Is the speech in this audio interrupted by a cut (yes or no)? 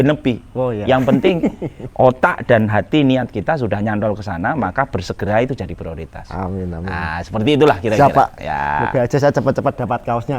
no